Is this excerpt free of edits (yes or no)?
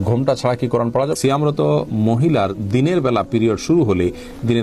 no